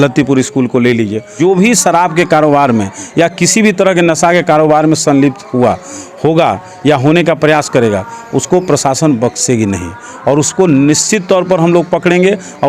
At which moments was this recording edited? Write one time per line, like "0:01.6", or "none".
0:01.3

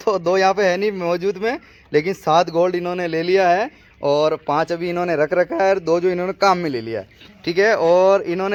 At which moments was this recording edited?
none

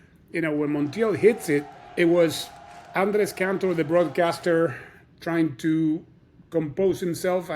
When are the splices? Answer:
0:01.8

